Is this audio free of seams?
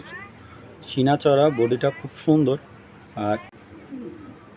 no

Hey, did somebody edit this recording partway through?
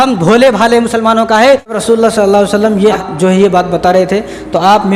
yes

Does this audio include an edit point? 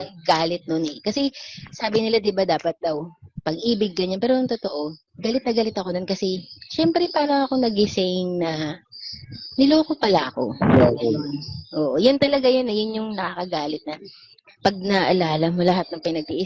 yes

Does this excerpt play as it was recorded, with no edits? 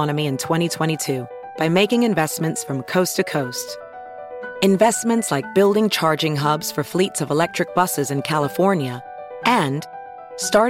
yes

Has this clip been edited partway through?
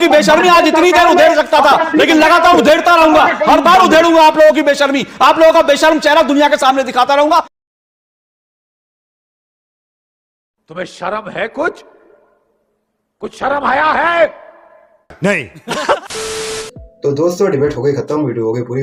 no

